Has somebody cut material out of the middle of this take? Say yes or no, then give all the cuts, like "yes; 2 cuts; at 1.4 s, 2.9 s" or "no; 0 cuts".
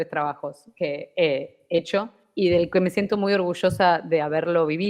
yes; 1 cut; at 1.9 s